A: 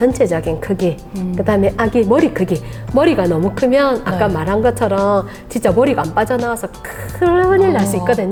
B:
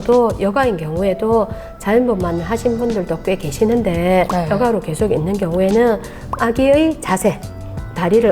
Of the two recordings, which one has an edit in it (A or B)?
B